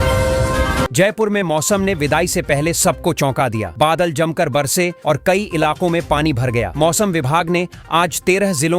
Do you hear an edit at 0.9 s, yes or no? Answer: yes